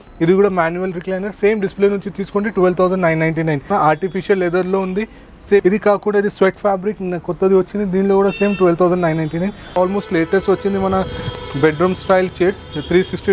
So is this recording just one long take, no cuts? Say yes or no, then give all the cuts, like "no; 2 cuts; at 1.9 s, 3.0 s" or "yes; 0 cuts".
no; 3 cuts; at 3.7 s, 5.6 s, 9.7 s